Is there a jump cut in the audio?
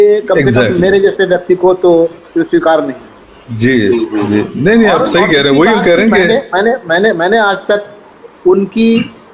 no; 0 cuts

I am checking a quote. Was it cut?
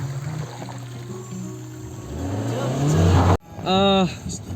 yes; 1 cut; at 3.4 s

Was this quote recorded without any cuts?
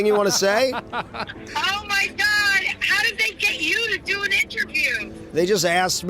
no; 2 cuts; at 1.4 s, 5.3 s

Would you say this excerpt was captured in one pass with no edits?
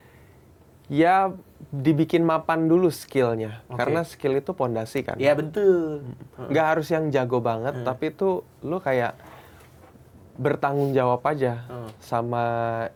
yes; 0 cuts

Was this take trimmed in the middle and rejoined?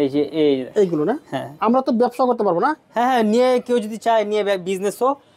no; 0 cuts

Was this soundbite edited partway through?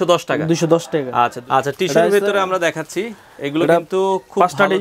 yes; 1 cut; at 1.4 s

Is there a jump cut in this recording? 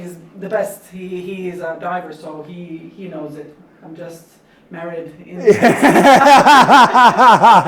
no; 0 cuts

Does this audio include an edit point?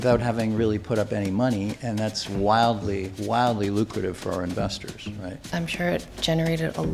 no; 0 cuts

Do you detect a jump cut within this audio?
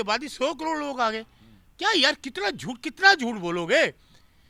no; 0 cuts

